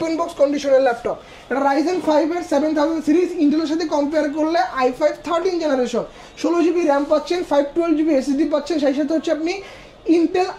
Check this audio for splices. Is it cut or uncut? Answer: uncut